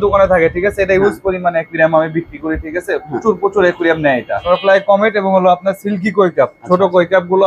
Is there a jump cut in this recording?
yes; 1 cut; at 4.4 s

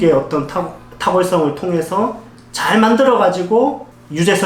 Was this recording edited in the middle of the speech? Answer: no; 0 cuts

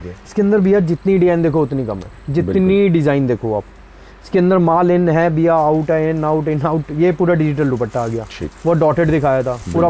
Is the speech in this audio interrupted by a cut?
no; 0 cuts

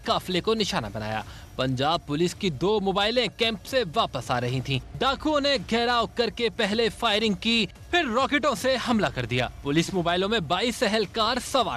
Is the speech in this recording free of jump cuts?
yes; 0 cuts

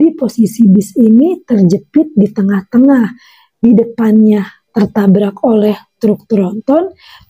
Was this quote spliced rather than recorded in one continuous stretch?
no; 0 cuts

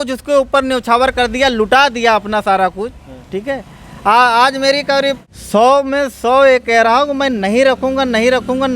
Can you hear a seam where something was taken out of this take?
yes; 1 cut; at 5.3 s

